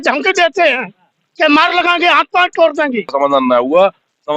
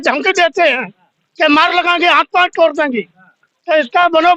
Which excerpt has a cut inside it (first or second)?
first